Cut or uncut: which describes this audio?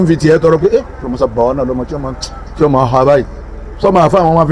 uncut